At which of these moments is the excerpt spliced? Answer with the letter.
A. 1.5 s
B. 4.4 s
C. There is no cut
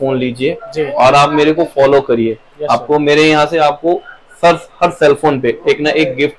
C